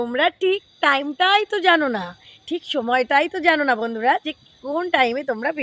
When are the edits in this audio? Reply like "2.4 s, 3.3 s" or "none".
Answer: none

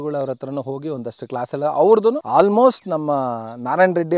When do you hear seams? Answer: 2.2 s

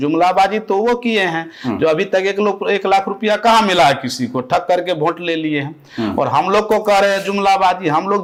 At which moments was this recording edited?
none

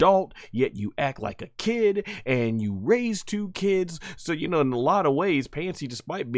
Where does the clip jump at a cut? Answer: none

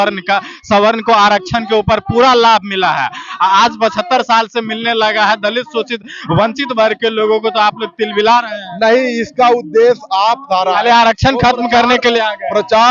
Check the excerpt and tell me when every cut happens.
10.5 s

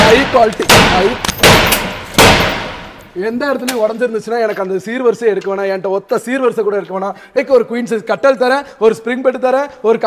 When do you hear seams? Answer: 7.4 s

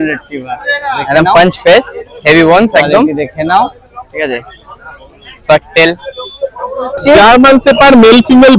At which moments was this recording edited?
7.0 s

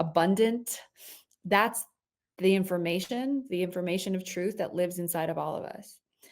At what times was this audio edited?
3.5 s

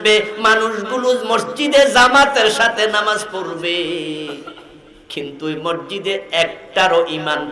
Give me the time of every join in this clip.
none

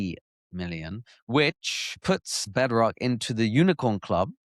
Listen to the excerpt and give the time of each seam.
2.4 s

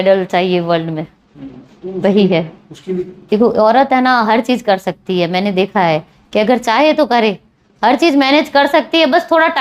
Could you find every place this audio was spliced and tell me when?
3.3 s

